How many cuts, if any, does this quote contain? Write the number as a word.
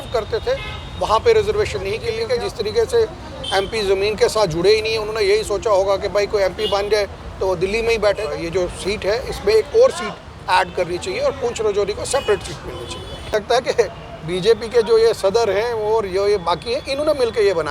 three